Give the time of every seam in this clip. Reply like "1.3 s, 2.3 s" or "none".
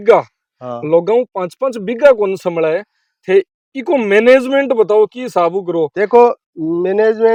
none